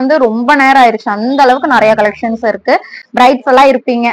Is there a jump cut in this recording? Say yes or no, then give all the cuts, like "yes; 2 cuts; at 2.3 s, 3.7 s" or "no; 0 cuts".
no; 0 cuts